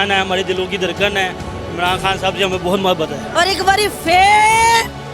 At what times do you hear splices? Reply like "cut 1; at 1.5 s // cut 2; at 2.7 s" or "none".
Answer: cut 1; at 3.2 s